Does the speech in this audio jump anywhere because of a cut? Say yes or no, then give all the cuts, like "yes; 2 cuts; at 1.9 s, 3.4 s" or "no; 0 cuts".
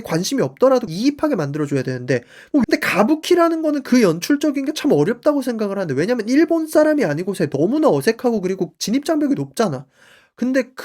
yes; 2 cuts; at 0.9 s, 2.6 s